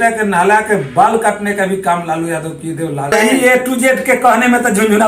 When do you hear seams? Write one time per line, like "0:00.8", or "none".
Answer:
0:03.1